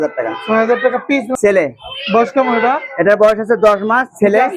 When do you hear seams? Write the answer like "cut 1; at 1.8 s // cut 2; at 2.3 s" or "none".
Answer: cut 1; at 1.3 s